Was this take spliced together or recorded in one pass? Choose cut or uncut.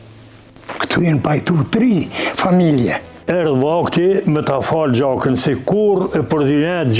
cut